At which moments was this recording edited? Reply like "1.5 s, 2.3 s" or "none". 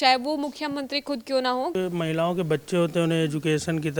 1.7 s